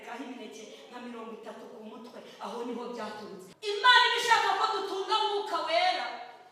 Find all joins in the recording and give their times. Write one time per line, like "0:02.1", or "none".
0:03.8

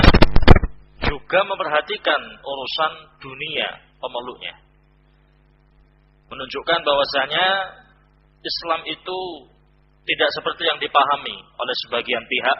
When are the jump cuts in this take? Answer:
none

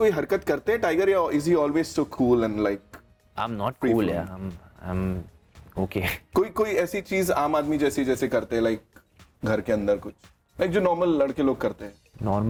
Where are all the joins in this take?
none

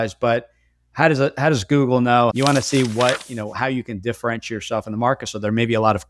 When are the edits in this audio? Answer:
0:02.3

